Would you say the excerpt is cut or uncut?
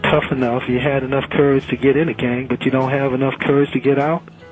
uncut